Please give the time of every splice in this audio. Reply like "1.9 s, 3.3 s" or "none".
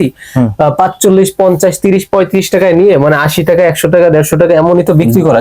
none